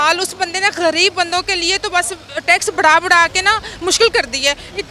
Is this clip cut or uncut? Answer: uncut